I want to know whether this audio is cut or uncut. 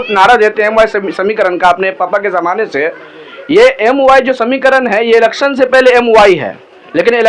uncut